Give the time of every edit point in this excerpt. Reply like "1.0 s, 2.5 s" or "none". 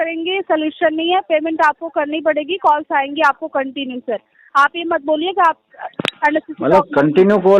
none